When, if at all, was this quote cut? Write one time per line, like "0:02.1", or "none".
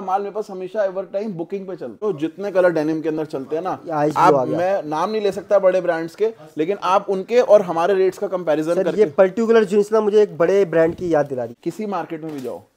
0:02.0
0:11.5